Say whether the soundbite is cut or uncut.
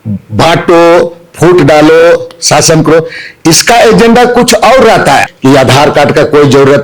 cut